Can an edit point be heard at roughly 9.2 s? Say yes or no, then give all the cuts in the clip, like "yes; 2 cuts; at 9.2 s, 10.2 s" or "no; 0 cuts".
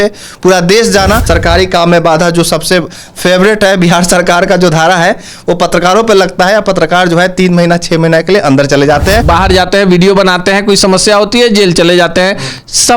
yes; 2 cuts; at 1.2 s, 9.2 s